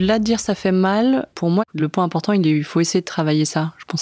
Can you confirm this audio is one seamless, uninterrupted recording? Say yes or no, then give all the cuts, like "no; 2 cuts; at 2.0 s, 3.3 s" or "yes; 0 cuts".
no; 1 cut; at 1.7 s